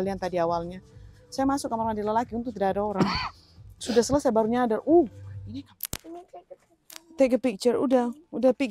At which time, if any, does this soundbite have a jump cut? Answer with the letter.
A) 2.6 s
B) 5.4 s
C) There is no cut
B